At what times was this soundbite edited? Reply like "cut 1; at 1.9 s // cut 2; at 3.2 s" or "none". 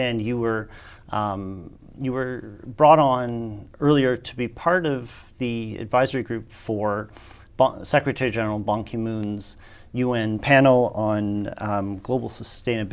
cut 1; at 8.5 s